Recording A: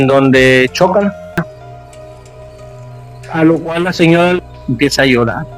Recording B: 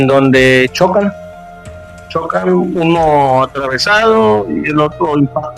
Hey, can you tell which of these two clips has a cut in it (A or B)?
A